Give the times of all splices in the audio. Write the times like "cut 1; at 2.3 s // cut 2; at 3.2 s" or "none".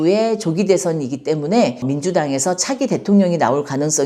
none